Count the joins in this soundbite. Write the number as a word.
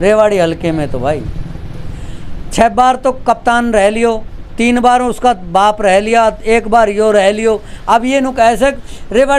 zero